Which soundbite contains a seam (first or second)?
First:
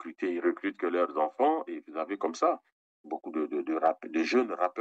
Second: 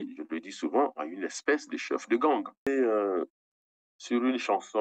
second